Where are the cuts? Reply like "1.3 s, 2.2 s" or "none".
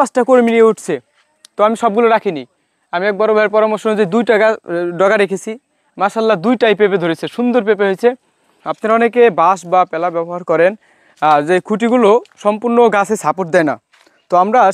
8.6 s